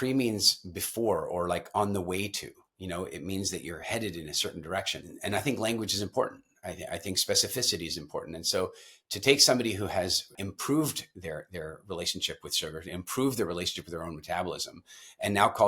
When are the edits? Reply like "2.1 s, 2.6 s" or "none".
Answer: 5.1 s, 10.4 s